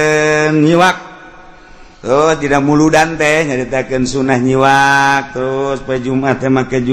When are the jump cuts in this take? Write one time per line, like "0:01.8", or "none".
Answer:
none